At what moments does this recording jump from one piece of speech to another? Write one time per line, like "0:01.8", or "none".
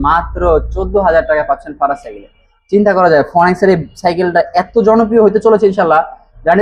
none